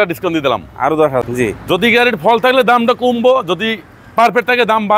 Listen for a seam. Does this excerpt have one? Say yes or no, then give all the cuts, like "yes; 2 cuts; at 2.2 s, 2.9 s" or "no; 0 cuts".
yes; 1 cut; at 1.2 s